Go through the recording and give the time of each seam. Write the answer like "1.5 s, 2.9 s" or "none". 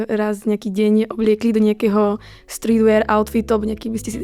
none